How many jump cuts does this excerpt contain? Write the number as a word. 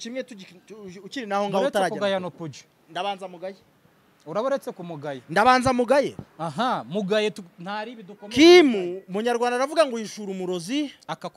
zero